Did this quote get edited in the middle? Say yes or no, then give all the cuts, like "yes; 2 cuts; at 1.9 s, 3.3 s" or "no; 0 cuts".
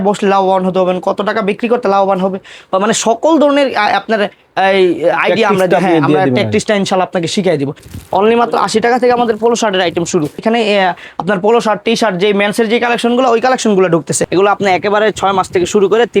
yes; 3 cuts; at 7.9 s, 10.4 s, 14.2 s